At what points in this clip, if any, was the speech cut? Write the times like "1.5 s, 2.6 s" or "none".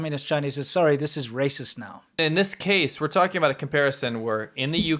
2.2 s